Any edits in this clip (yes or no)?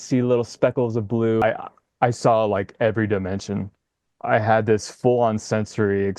yes